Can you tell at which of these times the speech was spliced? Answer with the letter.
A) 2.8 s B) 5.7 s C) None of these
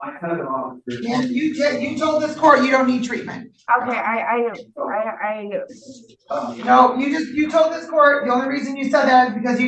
C